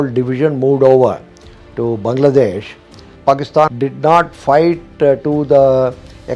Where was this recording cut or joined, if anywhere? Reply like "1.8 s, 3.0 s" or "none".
3.3 s